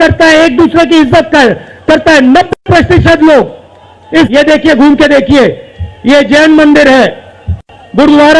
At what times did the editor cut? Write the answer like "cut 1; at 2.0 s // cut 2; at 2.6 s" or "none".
cut 1; at 4.3 s